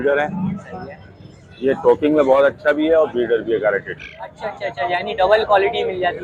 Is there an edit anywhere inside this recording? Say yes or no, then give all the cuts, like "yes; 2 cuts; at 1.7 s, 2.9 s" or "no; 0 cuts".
no; 0 cuts